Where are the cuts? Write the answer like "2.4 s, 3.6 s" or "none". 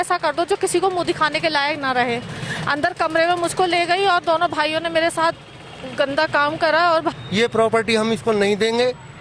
7.1 s